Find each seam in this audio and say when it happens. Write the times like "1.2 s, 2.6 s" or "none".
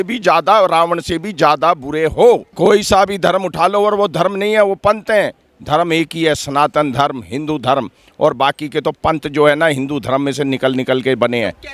2.5 s